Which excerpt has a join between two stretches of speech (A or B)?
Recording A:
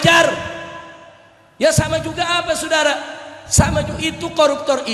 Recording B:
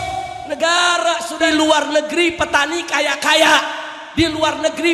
B